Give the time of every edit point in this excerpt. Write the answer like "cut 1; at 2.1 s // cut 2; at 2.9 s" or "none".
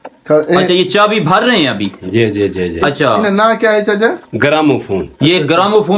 none

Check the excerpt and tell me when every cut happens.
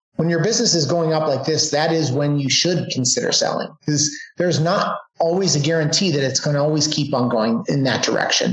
cut 1; at 7.6 s

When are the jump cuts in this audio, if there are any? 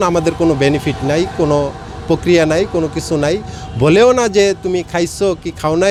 none

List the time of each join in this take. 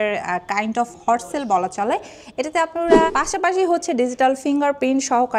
cut 1; at 3.1 s

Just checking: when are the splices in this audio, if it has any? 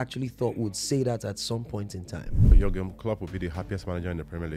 cut 1; at 2.5 s

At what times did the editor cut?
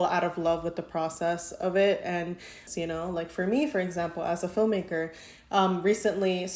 cut 1; at 2.6 s

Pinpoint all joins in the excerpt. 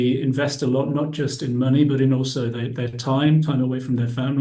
none

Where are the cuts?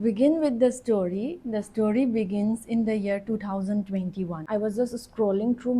cut 1; at 4.4 s

